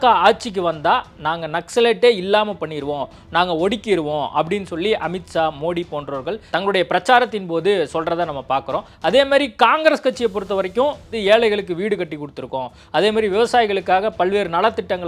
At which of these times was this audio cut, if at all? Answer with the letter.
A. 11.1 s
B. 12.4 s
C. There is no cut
A